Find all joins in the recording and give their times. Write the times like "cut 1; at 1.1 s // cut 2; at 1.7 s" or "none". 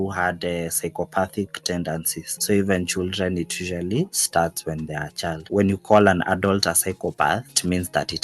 none